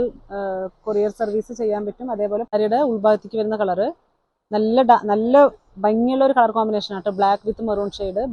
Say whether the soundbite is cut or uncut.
cut